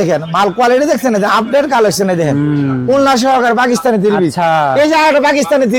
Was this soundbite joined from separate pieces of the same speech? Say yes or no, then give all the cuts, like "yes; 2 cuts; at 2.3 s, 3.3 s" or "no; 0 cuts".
no; 0 cuts